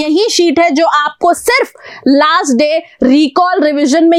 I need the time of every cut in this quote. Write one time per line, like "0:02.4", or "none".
none